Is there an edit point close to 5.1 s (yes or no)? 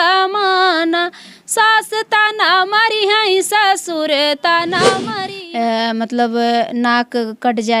yes